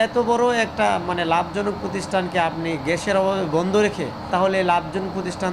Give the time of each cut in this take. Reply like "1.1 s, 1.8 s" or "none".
4.3 s